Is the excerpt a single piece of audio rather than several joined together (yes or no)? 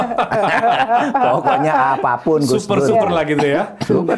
yes